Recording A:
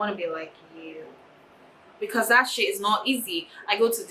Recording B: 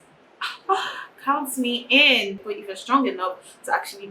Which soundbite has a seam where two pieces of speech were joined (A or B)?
B